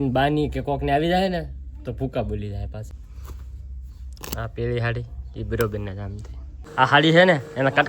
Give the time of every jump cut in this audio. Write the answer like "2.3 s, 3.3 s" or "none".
2.9 s, 6.6 s